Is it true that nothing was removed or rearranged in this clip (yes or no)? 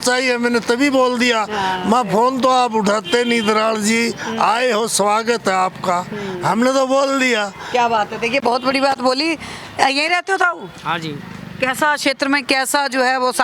yes